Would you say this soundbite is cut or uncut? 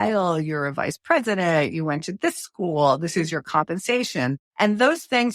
cut